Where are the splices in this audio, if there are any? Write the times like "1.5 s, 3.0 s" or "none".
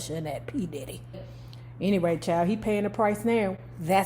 1.3 s